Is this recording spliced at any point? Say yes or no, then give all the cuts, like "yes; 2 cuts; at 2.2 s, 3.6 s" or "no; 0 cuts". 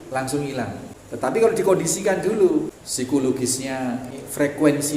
yes; 3 cuts; at 0.9 s, 2.8 s, 4.1 s